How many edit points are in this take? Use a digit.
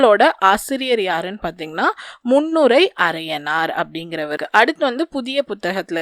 1